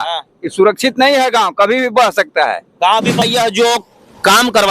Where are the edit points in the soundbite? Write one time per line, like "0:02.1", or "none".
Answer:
0:03.2